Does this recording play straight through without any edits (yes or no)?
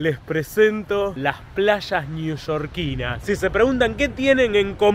no